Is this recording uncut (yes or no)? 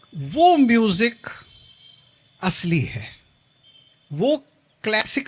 yes